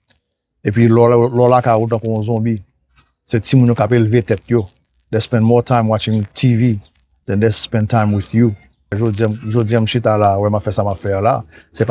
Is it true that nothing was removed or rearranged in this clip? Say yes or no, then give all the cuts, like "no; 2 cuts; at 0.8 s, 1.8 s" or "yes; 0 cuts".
no; 1 cut; at 9.0 s